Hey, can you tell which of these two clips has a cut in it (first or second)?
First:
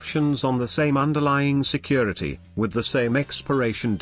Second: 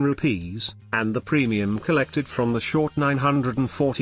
second